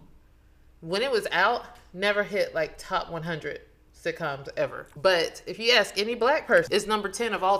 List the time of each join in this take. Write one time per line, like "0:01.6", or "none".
0:04.8
0:06.7